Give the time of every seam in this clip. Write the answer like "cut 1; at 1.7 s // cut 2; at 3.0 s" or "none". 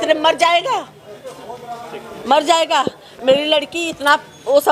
none